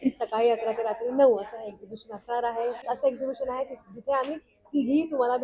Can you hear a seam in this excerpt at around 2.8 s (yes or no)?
yes